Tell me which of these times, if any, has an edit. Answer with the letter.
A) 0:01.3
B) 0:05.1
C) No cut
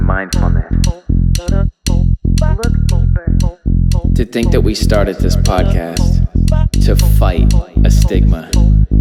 C